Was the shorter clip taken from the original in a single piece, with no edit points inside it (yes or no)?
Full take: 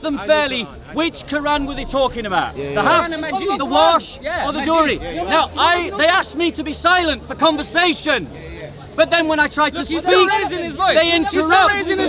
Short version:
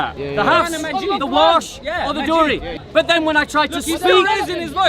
no